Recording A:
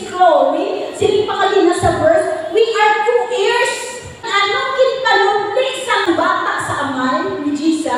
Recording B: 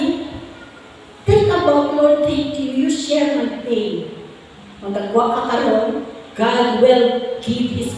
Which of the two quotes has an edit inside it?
A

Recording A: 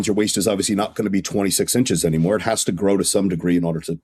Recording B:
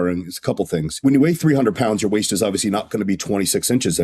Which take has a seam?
B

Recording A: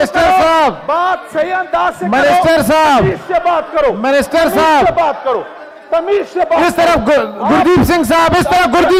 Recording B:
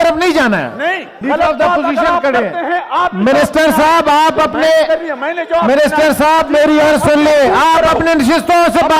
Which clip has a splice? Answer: B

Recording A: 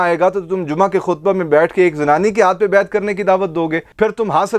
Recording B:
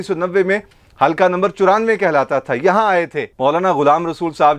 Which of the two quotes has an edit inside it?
B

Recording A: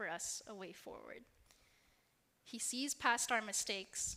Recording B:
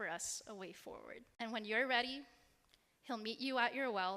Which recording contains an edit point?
B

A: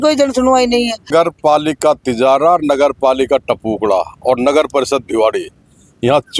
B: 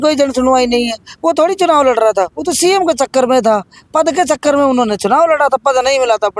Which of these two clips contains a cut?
A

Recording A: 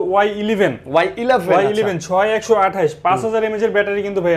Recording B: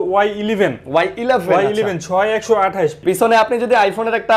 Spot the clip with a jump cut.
B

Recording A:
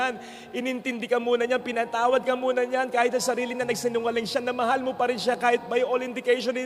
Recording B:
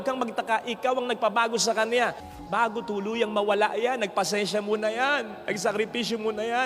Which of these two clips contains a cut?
B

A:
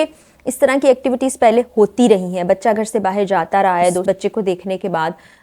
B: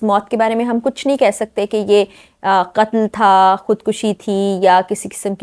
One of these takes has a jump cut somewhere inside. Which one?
A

